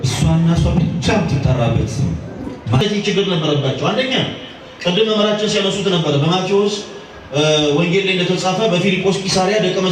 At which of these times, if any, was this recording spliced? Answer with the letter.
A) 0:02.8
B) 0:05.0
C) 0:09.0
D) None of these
A